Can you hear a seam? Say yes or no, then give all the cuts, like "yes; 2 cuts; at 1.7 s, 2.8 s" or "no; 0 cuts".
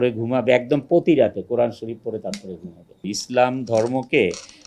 yes; 1 cut; at 3.2 s